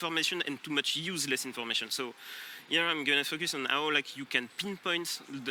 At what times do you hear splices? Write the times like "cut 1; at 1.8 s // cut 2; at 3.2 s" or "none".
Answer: none